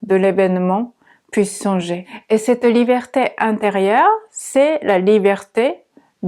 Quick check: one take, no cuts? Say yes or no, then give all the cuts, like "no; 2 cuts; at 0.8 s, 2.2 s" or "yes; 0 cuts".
no; 1 cut; at 2.1 s